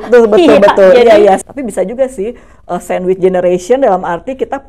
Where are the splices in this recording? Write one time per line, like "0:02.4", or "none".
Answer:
0:01.4